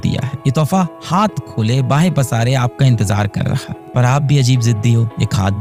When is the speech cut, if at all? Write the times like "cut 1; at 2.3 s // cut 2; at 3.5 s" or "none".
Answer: none